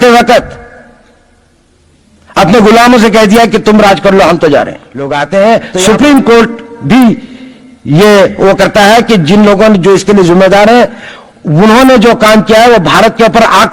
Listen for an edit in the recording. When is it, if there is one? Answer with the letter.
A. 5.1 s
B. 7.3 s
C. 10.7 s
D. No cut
A